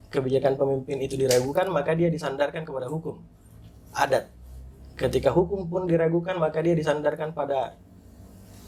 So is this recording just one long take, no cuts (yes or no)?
yes